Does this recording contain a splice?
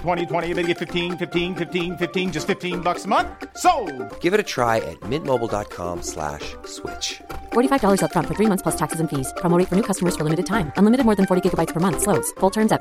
no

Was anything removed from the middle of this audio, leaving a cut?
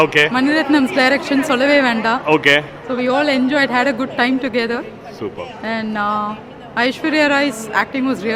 no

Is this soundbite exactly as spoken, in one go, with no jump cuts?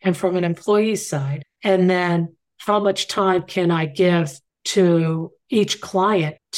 yes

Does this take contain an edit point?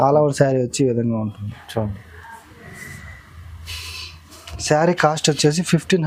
no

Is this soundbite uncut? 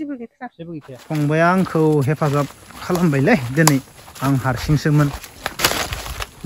no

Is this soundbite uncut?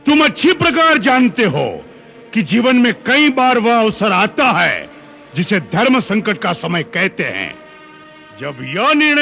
yes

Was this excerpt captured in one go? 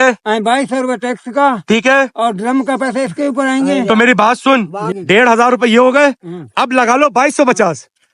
no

